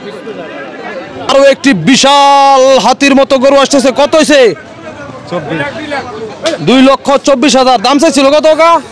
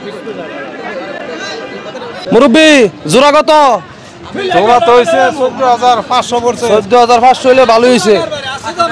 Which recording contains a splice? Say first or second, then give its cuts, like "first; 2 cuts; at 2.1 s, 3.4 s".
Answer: first; 1 cut; at 1.1 s